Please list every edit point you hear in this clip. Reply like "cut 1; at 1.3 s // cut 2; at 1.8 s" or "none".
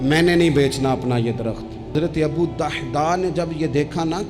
cut 1; at 1.9 s